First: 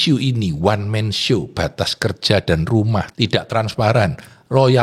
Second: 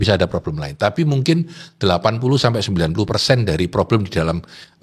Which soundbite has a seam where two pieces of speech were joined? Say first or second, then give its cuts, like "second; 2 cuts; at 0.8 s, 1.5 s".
first; 1 cut; at 3.1 s